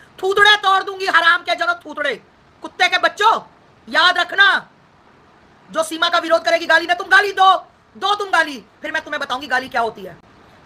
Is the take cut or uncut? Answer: uncut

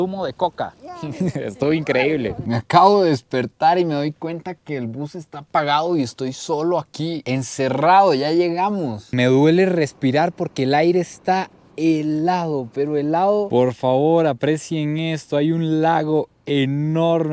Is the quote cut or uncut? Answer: cut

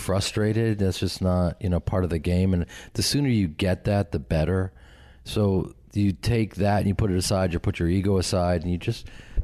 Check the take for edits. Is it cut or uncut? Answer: uncut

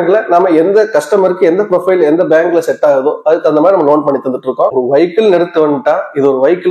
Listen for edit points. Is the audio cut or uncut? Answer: cut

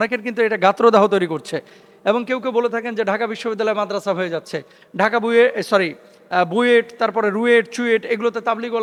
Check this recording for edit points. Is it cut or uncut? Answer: uncut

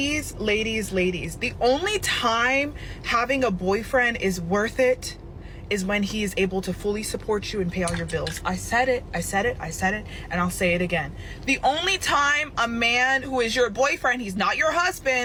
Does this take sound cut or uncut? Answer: uncut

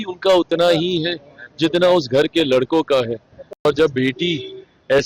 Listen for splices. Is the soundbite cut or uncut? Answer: cut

